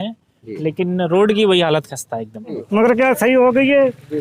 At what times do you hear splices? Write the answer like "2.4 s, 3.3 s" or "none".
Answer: 2.6 s